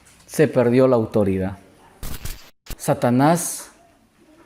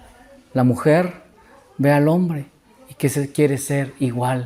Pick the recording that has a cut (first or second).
first